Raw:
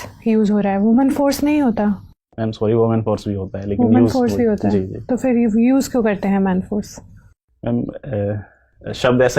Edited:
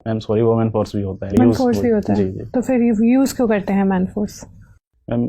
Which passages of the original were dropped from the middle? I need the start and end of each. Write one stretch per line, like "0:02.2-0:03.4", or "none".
0:03.7-0:03.9